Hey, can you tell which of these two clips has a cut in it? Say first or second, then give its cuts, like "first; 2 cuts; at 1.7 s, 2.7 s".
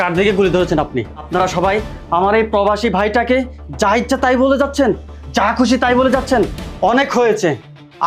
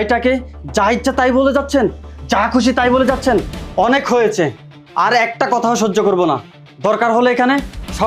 first; 1 cut; at 1.2 s